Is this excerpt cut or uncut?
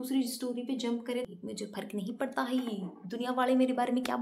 cut